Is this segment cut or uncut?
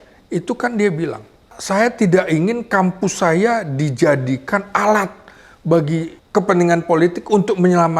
cut